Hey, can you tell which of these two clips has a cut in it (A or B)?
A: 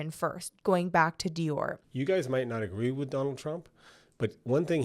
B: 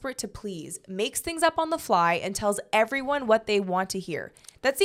A